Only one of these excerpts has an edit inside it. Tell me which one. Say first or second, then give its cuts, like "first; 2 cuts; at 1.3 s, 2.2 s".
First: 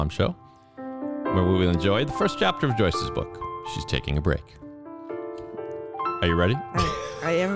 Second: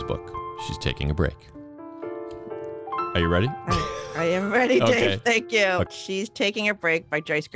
second; 1 cut; at 5.9 s